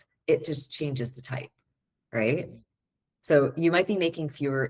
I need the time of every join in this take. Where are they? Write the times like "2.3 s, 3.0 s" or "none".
none